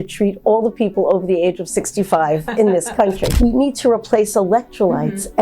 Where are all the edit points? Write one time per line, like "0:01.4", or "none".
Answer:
0:03.3